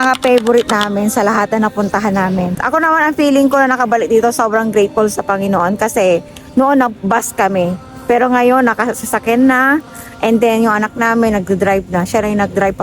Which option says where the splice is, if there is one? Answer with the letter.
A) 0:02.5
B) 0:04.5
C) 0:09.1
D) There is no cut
A